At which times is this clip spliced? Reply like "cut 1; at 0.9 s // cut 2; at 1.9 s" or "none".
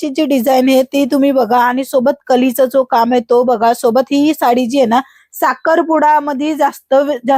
none